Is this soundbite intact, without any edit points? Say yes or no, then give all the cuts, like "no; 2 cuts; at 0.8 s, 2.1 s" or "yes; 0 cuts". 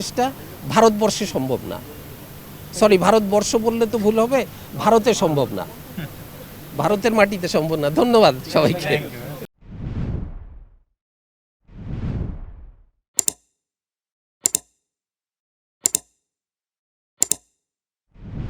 yes; 0 cuts